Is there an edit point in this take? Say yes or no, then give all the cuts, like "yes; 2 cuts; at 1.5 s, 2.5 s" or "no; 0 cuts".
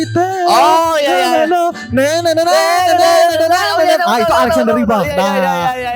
no; 0 cuts